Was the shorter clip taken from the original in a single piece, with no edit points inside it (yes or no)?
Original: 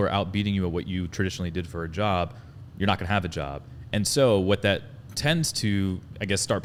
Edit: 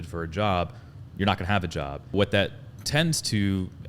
no